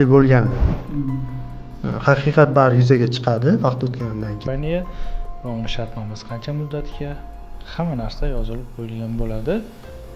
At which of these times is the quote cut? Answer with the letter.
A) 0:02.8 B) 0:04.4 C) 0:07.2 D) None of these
B